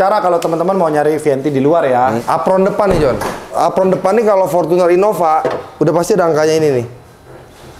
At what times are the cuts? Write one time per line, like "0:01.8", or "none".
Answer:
0:02.2
0:03.5